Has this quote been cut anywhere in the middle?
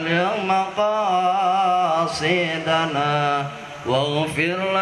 no; 0 cuts

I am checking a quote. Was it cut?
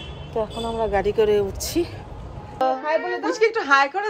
yes; 1 cut; at 2.6 s

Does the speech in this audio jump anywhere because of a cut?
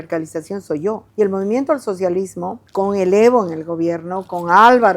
yes; 2 cuts; at 1.1 s, 2.6 s

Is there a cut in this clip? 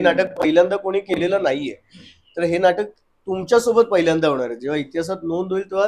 no; 0 cuts

